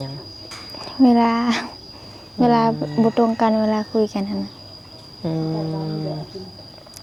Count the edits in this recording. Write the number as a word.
zero